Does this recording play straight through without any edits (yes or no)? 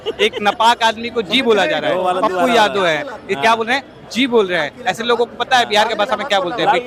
yes